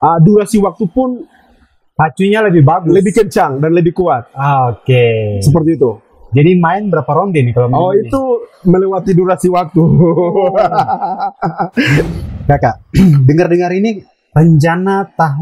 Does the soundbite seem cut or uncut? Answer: cut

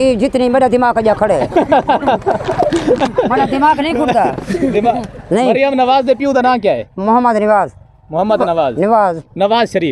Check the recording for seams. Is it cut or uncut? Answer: uncut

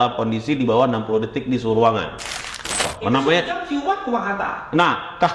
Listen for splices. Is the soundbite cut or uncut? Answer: cut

